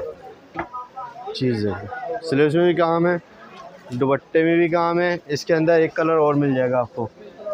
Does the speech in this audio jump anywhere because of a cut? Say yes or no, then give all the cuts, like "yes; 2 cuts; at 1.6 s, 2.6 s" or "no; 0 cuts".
no; 0 cuts